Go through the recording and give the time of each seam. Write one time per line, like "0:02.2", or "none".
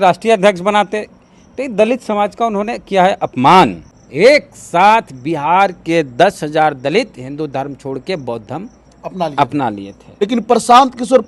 0:03.8
0:10.1